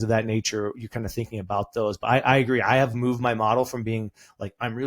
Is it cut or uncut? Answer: uncut